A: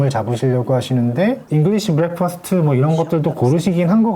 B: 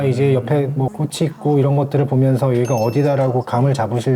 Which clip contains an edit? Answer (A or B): A